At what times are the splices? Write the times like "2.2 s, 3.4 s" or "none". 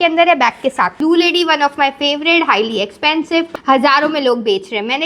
1.0 s, 3.5 s